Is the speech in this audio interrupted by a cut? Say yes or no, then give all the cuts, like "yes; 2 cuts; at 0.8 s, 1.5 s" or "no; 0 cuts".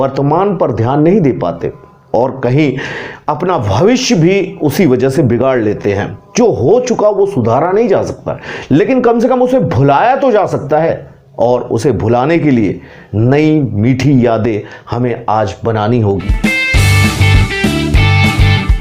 yes; 1 cut; at 16.2 s